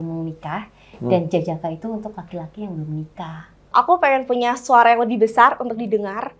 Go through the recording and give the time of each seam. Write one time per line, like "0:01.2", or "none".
0:03.6